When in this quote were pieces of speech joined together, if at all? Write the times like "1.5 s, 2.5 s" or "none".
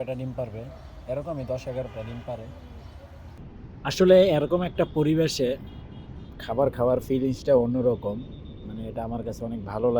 3.4 s